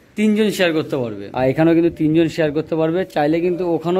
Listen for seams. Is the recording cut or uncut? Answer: cut